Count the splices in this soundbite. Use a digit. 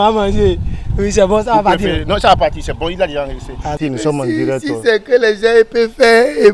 1